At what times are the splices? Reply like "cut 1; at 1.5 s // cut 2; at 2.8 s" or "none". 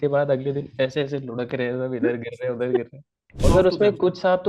cut 1; at 3.4 s

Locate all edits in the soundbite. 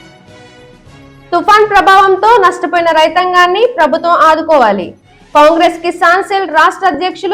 none

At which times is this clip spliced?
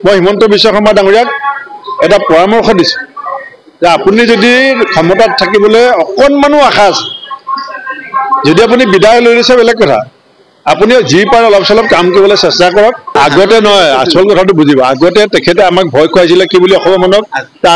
cut 1; at 13.1 s

